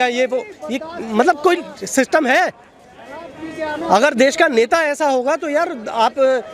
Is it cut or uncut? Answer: uncut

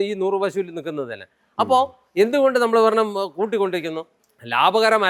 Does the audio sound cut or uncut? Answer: uncut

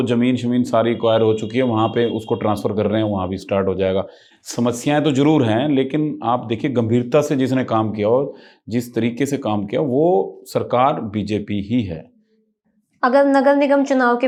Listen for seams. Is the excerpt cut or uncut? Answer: uncut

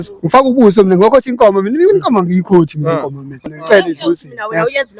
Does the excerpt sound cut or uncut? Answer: cut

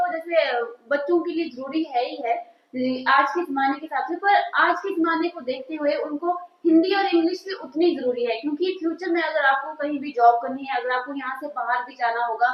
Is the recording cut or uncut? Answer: uncut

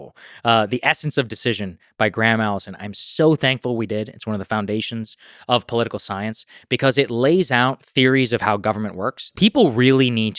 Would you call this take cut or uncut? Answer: cut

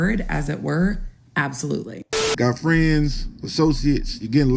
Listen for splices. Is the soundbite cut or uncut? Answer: cut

